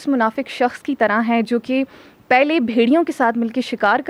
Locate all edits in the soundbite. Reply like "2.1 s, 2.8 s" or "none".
none